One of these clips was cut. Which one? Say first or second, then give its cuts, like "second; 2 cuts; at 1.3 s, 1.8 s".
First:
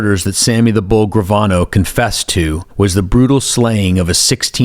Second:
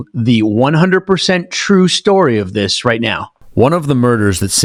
first; 1 cut; at 2.6 s